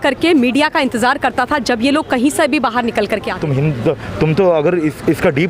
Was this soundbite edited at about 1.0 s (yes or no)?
no